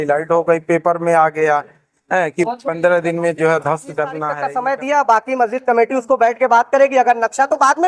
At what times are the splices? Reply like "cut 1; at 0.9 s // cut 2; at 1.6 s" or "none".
cut 1; at 4.3 s